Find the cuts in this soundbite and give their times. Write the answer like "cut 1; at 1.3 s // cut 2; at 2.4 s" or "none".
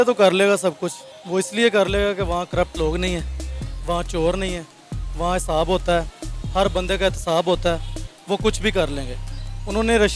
none